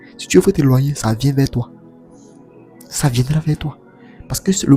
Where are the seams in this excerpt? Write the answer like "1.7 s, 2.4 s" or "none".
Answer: none